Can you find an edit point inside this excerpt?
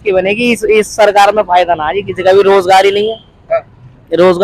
no; 0 cuts

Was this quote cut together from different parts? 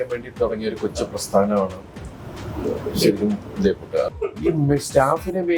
yes; 1 cut; at 4.1 s

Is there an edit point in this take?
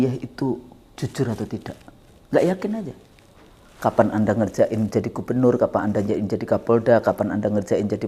no; 0 cuts

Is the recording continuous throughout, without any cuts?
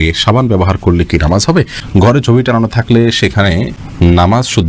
no; 2 cuts; at 1.4 s, 3.8 s

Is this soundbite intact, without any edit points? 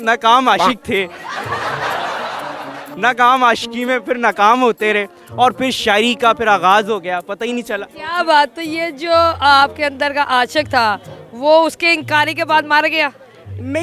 no; 2 cuts; at 1.2 s, 2.9 s

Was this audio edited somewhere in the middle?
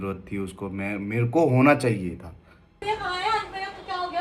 yes; 1 cut; at 2.8 s

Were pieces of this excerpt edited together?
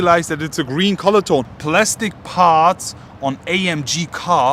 yes; 1 cut; at 1.5 s

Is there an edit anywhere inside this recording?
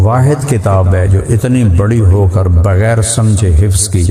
no; 0 cuts

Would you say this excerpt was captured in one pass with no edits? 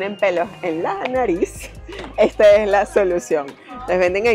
yes; 0 cuts

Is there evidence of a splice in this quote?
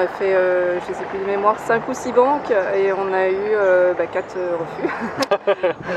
no; 0 cuts

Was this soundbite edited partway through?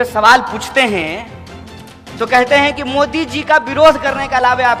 no; 0 cuts

